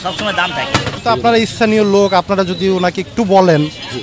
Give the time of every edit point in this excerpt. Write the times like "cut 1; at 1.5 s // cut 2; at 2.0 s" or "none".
cut 1; at 0.9 s